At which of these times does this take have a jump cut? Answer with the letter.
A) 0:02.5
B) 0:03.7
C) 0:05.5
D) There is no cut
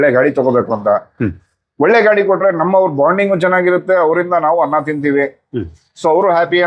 D